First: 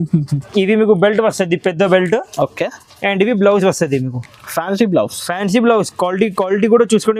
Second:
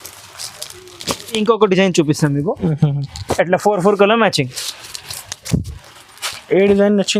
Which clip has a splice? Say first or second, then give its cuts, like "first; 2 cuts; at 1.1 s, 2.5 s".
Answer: second; 1 cut; at 1.4 s